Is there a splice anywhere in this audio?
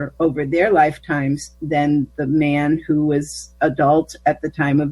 no; 0 cuts

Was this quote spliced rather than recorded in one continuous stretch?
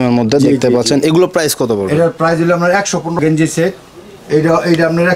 yes; 1 cut; at 3.2 s

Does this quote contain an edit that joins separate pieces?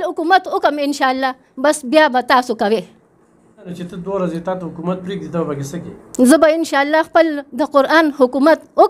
yes; 1 cut; at 3.7 s

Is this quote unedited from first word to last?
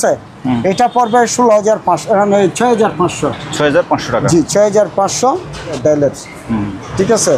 no; 1 cut; at 5.8 s

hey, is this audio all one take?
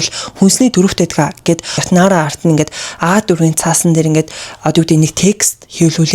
no; 1 cut; at 1.8 s

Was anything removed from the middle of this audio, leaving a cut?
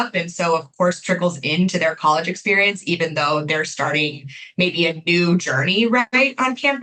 no; 0 cuts

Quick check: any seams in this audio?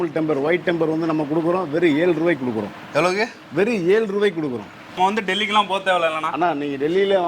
yes; 1 cut; at 5.0 s

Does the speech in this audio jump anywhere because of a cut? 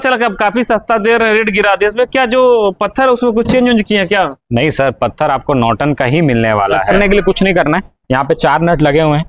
yes; 1 cut; at 7.0 s

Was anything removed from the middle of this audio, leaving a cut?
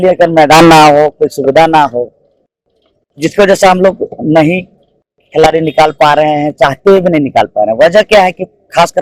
no; 0 cuts

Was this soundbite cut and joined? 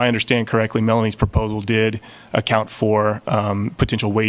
no; 0 cuts

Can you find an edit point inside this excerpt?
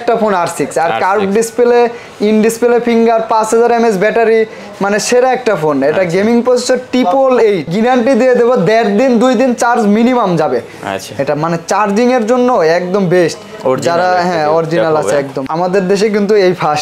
yes; 2 cuts; at 7.7 s, 15.4 s

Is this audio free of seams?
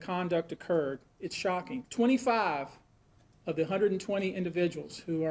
no; 1 cut; at 1.5 s

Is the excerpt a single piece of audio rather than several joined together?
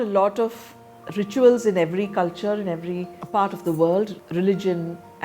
no; 1 cut; at 3.1 s

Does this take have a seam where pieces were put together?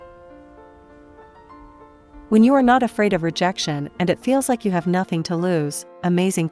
yes; 1 cut; at 2.3 s

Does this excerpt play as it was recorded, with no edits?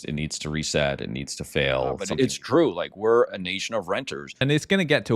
no; 2 cuts; at 2.1 s, 4.3 s

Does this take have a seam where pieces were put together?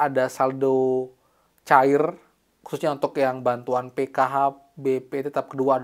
no; 0 cuts

